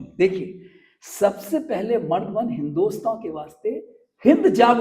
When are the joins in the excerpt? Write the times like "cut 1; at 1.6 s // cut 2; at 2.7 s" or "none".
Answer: none

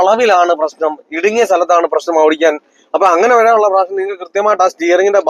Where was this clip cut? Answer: none

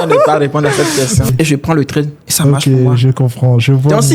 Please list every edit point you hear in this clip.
cut 1; at 1.3 s

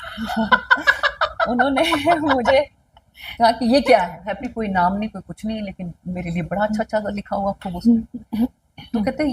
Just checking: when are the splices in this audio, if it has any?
cut 1; at 4.3 s

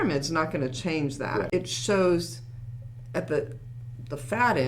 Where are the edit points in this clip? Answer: cut 1; at 1.5 s

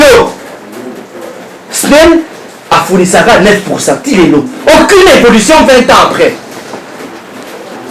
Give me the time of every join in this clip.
none

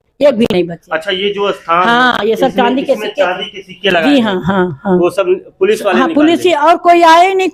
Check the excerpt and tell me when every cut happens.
none

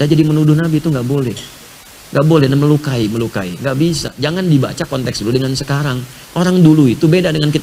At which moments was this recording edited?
none

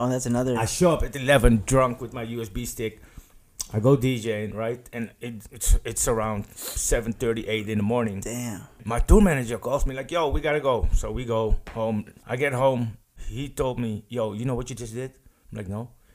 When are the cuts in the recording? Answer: cut 1; at 8.8 s // cut 2; at 12.2 s // cut 3; at 13.2 s

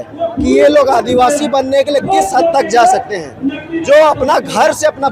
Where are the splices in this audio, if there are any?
none

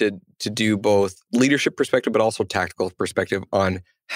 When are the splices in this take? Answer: cut 1; at 1.2 s

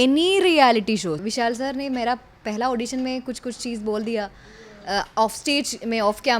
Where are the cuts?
cut 1; at 1.2 s

